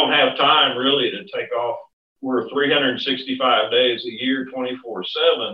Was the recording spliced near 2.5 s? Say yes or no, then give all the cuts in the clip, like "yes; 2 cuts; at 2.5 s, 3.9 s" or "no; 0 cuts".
yes; 1 cut; at 2.5 s